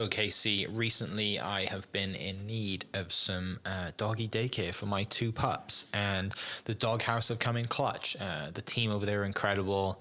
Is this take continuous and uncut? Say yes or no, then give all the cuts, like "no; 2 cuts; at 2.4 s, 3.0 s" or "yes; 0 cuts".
yes; 0 cuts